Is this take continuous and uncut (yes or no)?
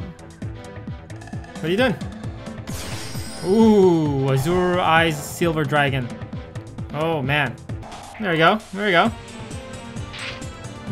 no